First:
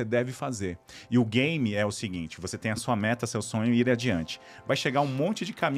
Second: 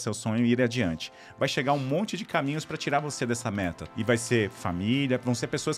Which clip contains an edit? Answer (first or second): second